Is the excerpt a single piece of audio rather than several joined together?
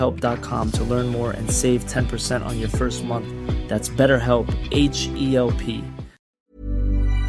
no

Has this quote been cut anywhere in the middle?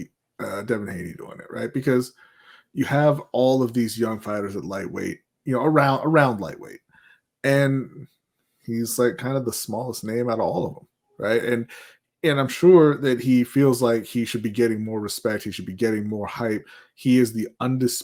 no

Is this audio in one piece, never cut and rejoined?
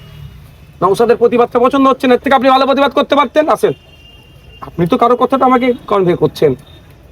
yes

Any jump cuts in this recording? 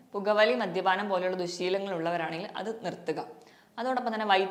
no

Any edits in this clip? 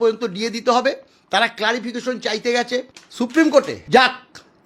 yes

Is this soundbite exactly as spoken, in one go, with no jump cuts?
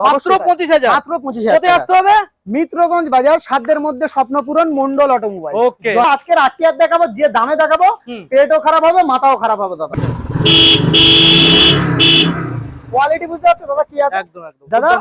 no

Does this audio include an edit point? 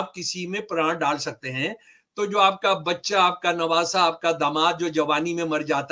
no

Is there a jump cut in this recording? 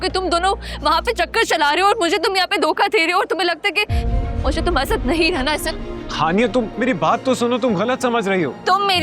no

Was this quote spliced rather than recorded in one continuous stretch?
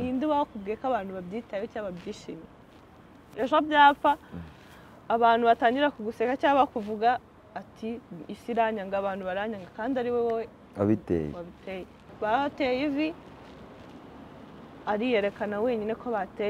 yes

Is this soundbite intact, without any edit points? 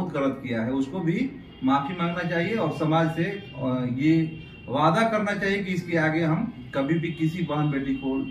yes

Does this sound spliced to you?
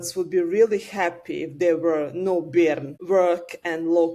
no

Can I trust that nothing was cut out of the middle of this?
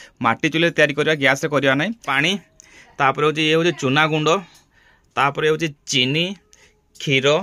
no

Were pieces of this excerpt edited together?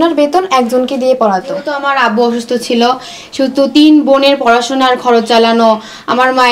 yes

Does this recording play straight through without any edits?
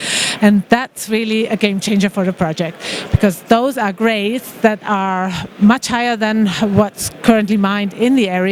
yes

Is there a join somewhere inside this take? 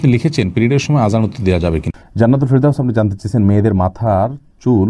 yes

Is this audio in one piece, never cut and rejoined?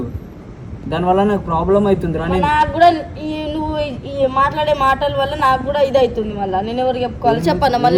yes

